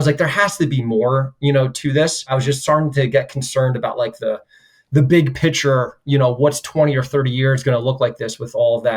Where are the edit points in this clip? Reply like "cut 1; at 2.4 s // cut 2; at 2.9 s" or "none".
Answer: cut 1; at 2.3 s